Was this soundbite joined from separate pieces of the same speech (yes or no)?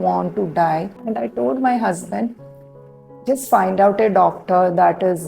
yes